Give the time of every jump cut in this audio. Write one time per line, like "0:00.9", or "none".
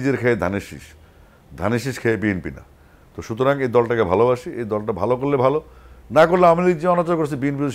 none